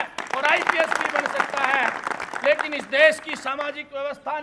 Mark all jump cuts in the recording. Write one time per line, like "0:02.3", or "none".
none